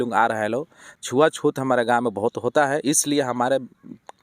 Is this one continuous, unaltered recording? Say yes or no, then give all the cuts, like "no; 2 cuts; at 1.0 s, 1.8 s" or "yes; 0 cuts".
no; 1 cut; at 0.9 s